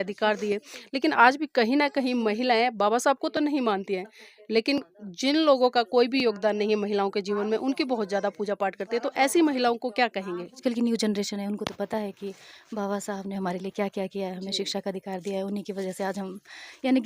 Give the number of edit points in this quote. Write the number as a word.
one